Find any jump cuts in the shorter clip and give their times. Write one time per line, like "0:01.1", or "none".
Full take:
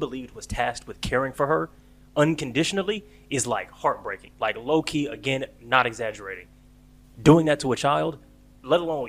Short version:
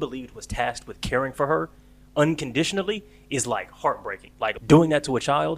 0:04.6

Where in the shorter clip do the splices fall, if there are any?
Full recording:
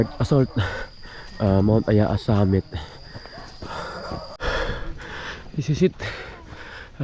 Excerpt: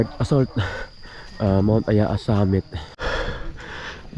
0:02.9

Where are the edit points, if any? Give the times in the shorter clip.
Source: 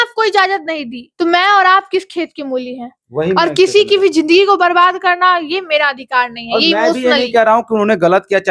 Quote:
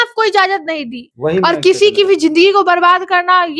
0:01.0

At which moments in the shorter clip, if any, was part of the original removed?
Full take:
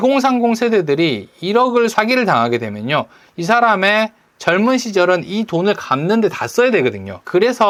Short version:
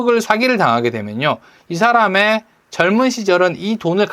none

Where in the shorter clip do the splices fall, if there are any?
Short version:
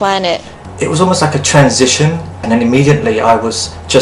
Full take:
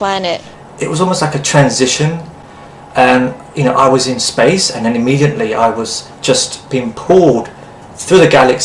0:02.4

